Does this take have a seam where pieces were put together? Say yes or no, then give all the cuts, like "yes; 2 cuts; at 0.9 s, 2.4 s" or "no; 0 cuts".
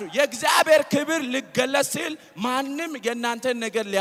no; 0 cuts